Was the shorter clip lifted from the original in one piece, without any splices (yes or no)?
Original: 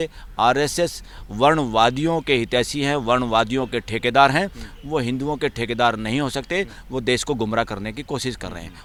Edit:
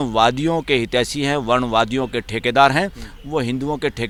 yes